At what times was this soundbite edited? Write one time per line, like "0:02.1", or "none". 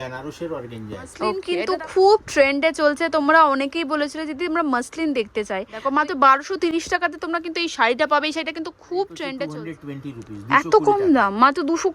0:01.4
0:05.8
0:09.5